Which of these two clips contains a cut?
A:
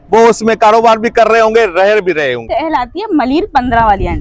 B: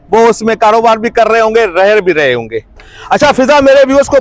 A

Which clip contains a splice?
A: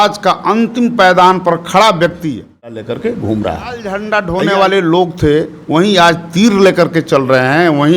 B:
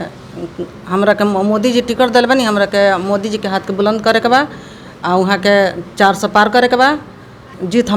A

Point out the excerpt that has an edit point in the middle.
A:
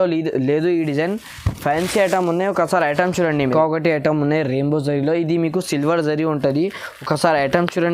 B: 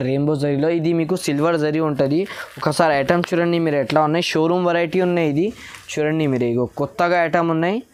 A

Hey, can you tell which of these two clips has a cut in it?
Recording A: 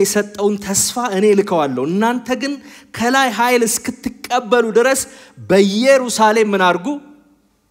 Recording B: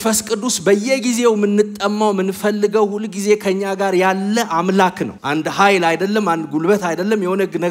B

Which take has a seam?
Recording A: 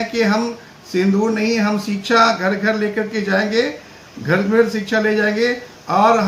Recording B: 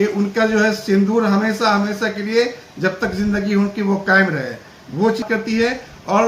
B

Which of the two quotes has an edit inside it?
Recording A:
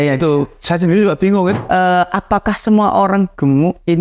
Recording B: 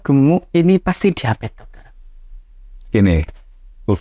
A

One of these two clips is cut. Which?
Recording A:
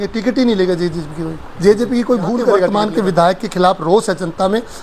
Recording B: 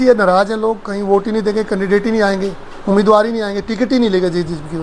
A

